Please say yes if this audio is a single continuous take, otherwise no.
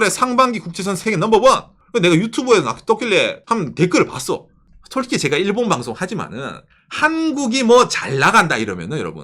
no